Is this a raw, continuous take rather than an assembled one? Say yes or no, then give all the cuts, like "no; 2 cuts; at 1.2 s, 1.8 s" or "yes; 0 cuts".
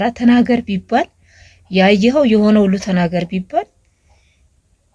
yes; 0 cuts